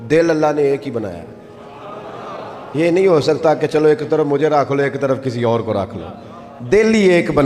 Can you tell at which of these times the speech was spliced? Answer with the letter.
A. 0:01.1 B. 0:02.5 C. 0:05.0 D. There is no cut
D